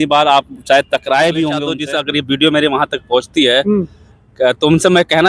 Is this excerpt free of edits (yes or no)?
no